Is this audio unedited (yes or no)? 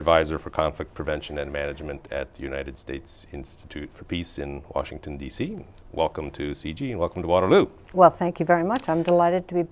yes